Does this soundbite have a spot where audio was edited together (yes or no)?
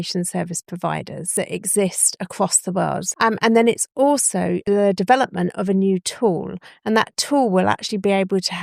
yes